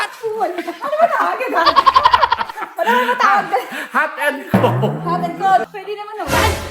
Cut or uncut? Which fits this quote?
cut